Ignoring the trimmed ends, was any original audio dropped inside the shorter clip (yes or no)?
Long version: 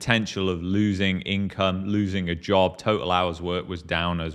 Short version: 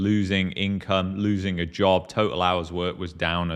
no